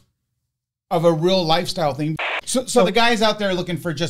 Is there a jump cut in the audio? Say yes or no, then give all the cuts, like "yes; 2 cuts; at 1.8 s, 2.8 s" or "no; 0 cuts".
yes; 1 cut; at 2.2 s